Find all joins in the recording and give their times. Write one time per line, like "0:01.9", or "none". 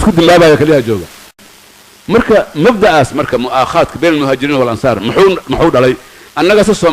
0:01.3